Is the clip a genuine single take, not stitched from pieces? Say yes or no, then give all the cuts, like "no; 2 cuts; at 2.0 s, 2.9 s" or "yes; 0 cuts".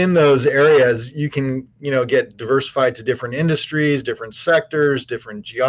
yes; 0 cuts